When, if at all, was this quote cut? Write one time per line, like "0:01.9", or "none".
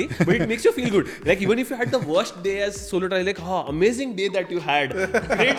none